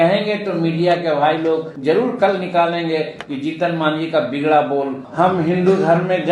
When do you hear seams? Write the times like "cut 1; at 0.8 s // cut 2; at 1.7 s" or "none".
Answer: cut 1; at 1.7 s // cut 2; at 5.0 s